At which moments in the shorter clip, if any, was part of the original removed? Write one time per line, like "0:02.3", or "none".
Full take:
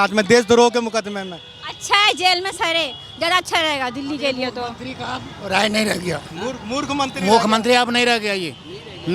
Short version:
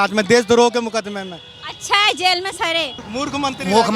0:03.0